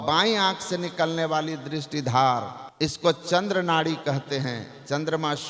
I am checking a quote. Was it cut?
yes; 1 cut; at 2.6 s

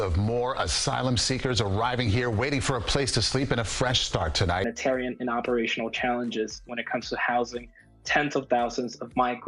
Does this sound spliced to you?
yes; 1 cut; at 4.6 s

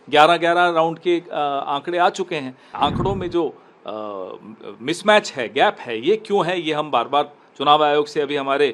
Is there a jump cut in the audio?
yes; 1 cut; at 2.7 s

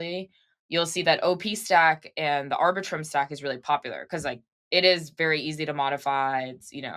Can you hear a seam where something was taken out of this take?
no; 0 cuts

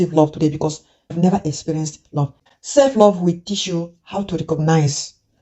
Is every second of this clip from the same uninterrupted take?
no; 2 cuts; at 1.1 s, 2.4 s

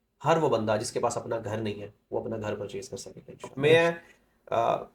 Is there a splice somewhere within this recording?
yes; 1 cut; at 3.5 s

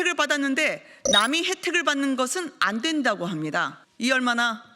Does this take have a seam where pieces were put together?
yes; 1 cut; at 3.8 s

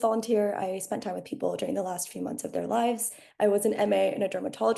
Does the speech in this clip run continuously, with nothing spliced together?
no; 1 cut; at 3.2 s

